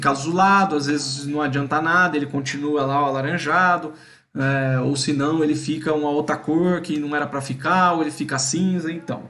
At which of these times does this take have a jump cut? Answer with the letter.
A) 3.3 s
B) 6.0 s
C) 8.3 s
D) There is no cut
D